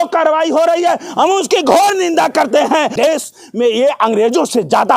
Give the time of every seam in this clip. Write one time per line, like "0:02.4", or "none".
0:02.9